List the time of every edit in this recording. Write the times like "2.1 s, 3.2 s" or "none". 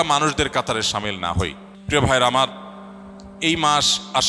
1.7 s